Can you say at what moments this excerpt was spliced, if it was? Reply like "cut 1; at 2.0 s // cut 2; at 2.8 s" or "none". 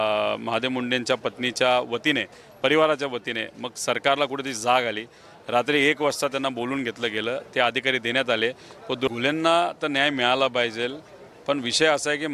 cut 1; at 9.1 s